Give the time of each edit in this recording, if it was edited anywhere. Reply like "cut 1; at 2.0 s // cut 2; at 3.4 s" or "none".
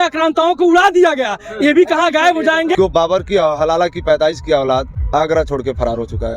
cut 1; at 2.8 s